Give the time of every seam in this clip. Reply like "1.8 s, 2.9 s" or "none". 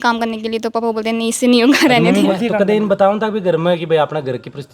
2.5 s